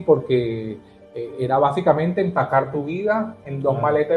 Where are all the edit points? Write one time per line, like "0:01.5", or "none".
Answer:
none